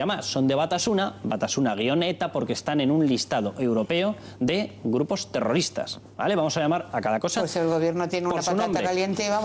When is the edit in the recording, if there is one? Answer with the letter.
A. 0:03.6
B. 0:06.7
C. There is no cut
A